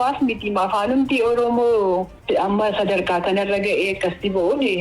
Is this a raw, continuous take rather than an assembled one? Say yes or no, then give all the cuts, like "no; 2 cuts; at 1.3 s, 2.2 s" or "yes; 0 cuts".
no; 1 cut; at 2.1 s